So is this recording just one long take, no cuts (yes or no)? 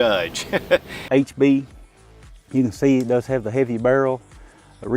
no